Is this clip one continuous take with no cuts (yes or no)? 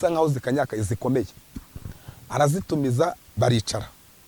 yes